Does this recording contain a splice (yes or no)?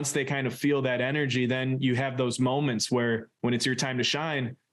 no